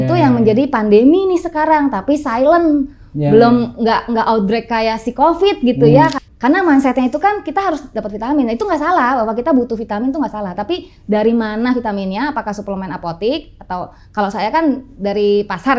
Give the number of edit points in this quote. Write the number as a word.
one